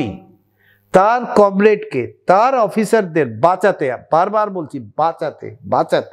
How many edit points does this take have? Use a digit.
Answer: 0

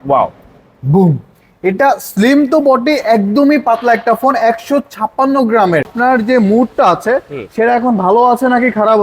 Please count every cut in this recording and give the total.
1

